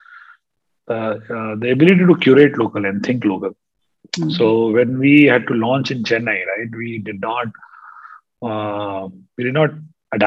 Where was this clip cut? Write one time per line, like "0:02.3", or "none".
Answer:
none